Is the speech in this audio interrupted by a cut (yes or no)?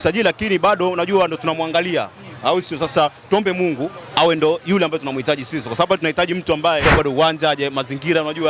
yes